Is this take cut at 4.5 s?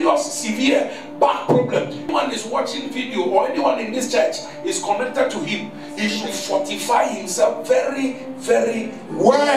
no; 1 cut; at 2.1 s

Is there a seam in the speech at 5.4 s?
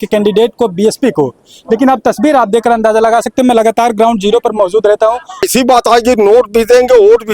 yes; 1 cut; at 5.4 s

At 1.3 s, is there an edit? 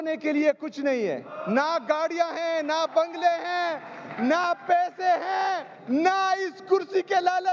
yes; 2 cuts; at 1.3 s, 5.7 s

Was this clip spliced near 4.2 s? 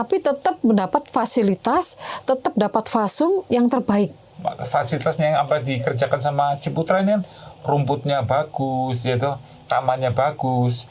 yes; 1 cut; at 4.2 s

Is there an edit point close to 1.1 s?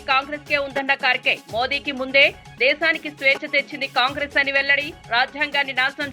no; 0 cuts

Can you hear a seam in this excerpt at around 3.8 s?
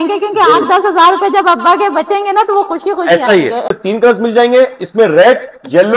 yes; 1 cut; at 3.8 s

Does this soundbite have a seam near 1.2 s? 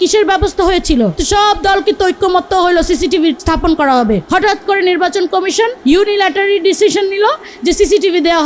yes; 4 cuts; at 1.2 s, 3.4 s, 4.2 s, 5.8 s

